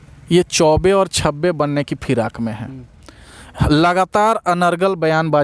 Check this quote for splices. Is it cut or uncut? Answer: uncut